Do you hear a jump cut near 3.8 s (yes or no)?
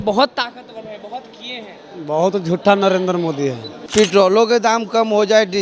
yes